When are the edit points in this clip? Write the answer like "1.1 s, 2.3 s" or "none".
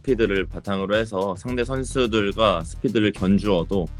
none